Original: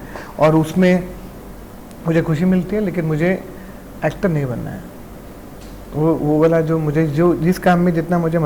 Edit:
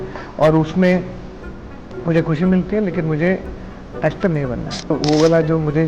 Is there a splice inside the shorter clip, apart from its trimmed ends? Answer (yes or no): yes